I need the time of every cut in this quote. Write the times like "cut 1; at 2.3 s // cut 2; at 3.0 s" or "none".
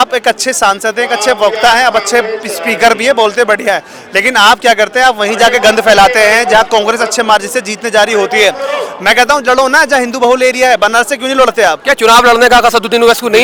none